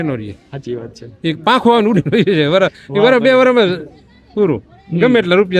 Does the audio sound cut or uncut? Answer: uncut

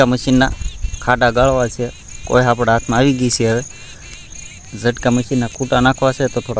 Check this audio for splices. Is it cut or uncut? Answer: uncut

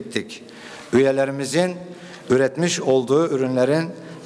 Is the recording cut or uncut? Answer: uncut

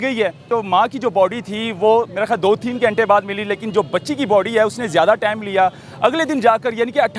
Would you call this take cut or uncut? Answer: uncut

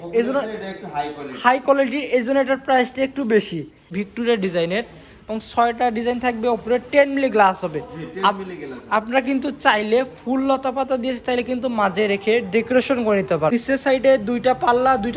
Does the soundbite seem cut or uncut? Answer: cut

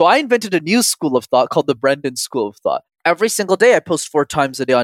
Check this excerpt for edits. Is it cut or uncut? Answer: cut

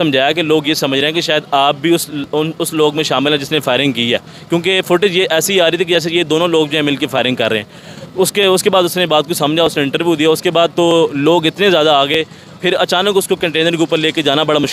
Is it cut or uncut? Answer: uncut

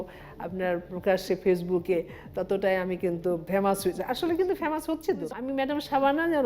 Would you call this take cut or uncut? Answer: cut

